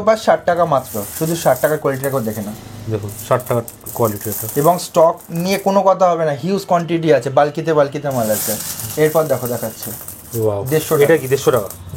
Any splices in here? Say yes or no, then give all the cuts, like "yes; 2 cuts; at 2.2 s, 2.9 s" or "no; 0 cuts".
no; 0 cuts